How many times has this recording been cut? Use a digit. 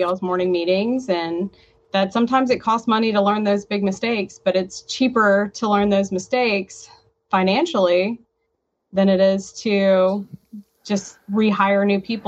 0